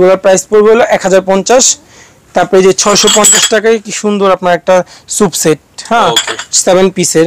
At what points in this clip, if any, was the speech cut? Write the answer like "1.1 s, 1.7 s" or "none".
none